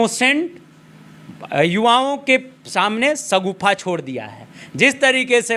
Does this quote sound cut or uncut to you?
uncut